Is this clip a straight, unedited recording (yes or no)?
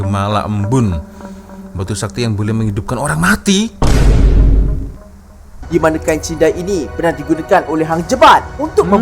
no